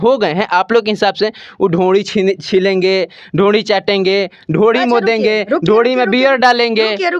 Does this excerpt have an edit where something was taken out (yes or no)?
no